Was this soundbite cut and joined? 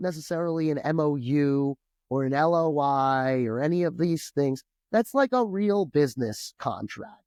no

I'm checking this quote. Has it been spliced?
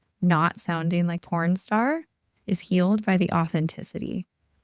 yes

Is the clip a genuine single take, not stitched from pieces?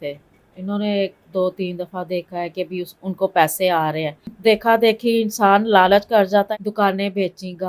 no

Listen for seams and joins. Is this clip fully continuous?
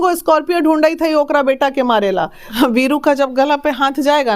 no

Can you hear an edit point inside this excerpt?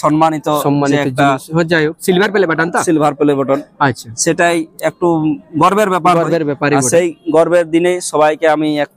no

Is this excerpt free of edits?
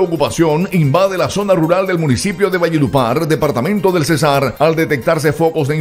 yes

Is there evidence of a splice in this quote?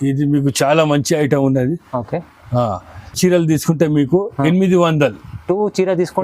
no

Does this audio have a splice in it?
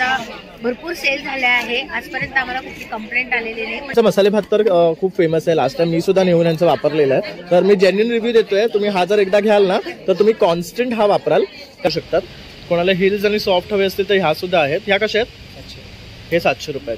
yes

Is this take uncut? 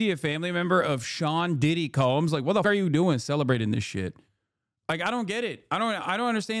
no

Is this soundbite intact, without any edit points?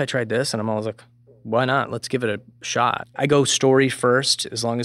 no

